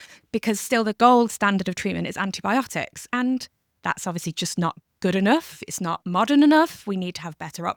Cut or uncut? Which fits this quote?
uncut